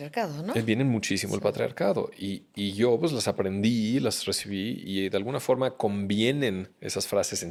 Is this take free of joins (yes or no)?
yes